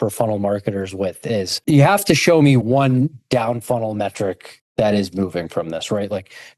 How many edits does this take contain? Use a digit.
1